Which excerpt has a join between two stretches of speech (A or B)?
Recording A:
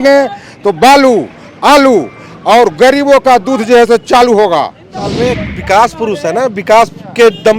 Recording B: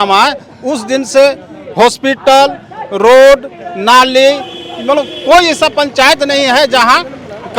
A